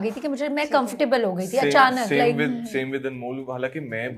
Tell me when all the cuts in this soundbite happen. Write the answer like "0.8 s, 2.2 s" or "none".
none